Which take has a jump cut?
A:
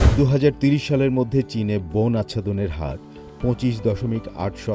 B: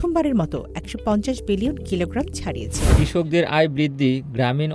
B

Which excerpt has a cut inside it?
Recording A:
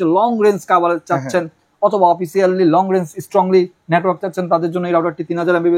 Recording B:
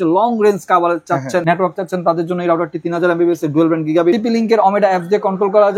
B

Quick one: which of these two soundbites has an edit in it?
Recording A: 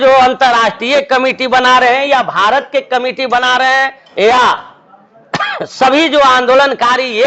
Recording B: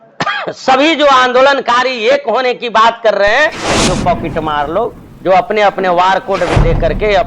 B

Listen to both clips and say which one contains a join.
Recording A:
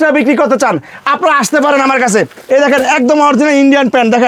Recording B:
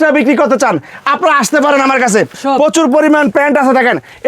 B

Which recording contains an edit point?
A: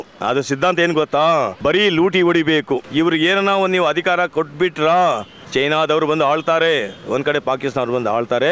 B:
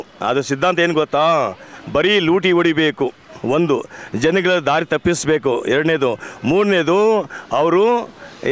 A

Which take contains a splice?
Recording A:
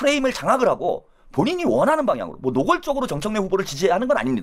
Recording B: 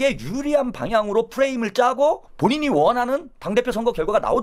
B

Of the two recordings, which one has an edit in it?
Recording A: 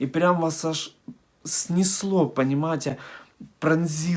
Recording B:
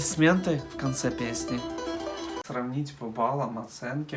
B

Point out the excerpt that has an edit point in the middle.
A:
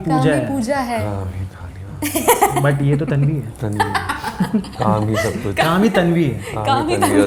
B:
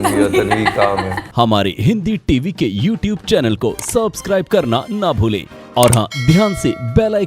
B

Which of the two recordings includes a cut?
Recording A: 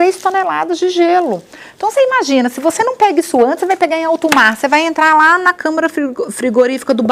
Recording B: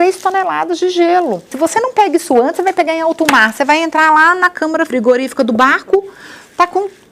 B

